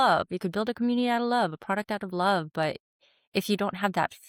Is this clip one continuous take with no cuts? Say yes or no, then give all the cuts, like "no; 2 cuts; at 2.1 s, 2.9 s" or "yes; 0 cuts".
yes; 0 cuts